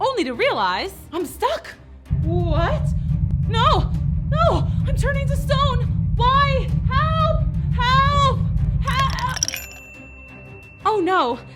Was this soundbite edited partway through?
no; 0 cuts

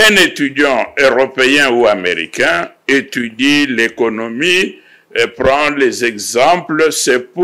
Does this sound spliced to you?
no; 0 cuts

